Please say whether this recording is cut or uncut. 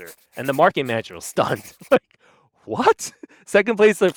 uncut